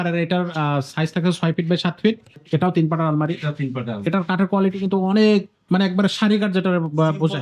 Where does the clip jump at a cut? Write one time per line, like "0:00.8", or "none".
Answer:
0:02.4